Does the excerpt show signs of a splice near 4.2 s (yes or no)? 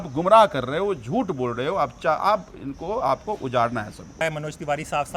yes